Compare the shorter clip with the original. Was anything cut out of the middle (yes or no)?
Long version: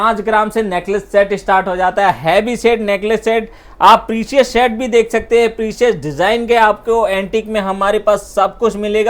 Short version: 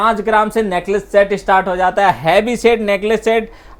no